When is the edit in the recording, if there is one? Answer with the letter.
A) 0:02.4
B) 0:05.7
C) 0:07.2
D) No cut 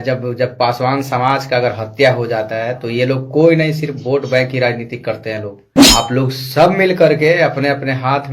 B